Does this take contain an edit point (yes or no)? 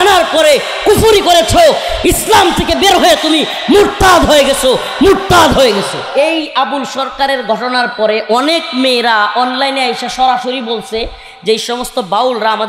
yes